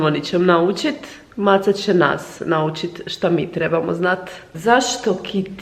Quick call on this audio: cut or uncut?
cut